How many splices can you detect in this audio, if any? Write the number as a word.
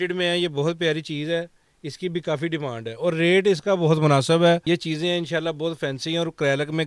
one